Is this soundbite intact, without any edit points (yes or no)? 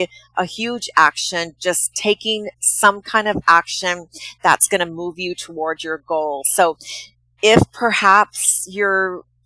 yes